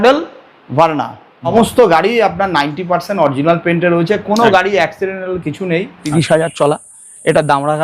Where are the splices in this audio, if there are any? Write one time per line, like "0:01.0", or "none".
0:01.5
0:06.0